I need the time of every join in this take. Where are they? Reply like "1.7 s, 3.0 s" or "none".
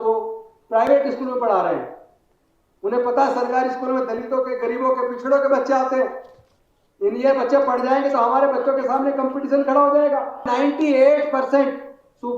10.5 s